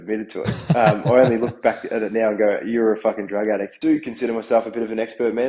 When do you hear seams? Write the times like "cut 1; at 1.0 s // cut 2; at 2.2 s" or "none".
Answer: cut 1; at 3.7 s